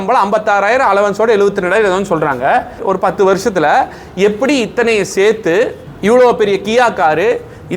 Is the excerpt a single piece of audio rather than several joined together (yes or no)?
no